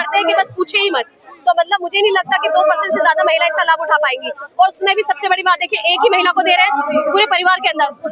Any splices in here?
no; 0 cuts

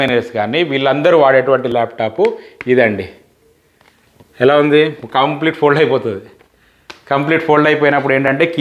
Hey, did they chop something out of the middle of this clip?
no; 0 cuts

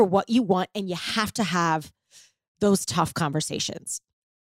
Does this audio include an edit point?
no; 0 cuts

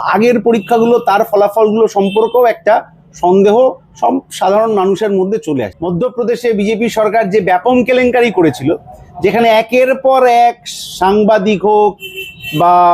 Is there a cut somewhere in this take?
yes; 1 cut; at 5.7 s

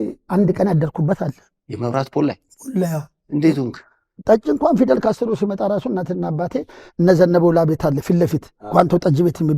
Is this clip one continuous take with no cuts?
no; 1 cut; at 4.1 s

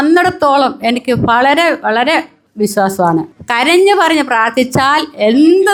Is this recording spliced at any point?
no; 0 cuts

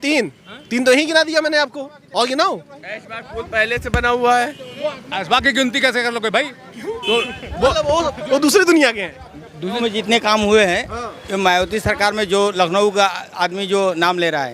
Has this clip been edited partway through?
yes; 1 cut; at 9.8 s

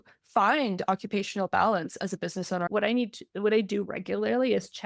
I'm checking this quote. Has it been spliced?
yes; 1 cut; at 2.7 s

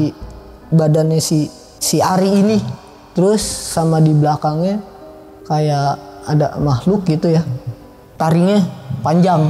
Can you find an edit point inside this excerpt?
no; 0 cuts

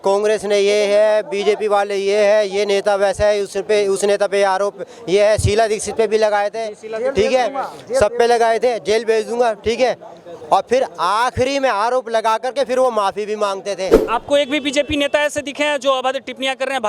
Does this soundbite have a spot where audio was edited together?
yes; 1 cut; at 14.0 s

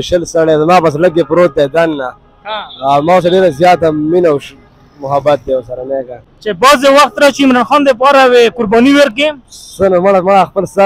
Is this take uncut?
yes; 0 cuts

